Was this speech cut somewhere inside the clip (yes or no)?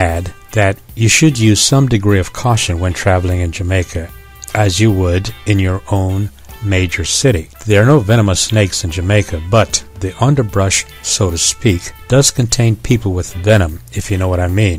yes